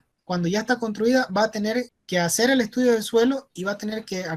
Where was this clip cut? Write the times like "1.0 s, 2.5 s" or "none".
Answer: 2.0 s